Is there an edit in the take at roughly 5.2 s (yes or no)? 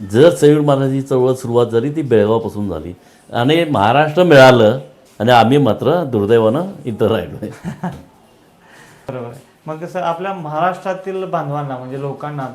no